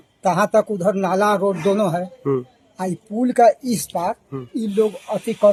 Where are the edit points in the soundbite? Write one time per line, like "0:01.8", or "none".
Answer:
none